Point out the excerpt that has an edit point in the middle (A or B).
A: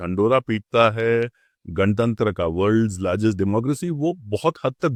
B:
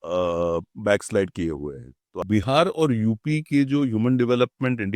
B